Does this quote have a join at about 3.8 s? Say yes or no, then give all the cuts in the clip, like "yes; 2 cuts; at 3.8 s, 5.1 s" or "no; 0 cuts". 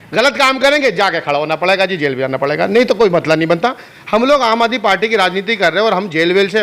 yes; 1 cut; at 3.8 s